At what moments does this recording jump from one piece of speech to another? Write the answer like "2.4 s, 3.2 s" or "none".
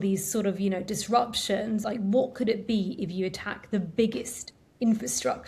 1.8 s